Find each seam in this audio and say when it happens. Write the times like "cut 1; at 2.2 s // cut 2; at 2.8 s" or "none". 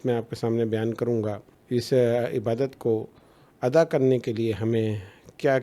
cut 1; at 1.5 s